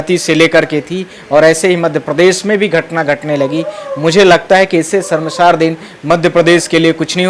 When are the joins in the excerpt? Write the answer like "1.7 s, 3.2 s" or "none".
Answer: none